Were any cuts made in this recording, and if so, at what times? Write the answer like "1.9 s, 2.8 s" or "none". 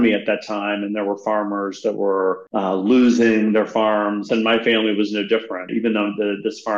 2.4 s, 4.3 s, 5.7 s